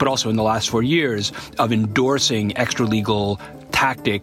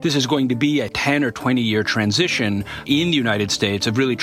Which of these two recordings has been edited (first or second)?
second